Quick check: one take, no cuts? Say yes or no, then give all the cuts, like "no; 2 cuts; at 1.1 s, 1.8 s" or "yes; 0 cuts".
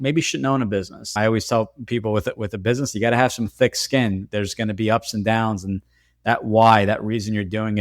no; 1 cut; at 1.2 s